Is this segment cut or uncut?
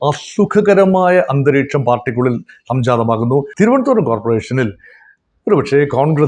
cut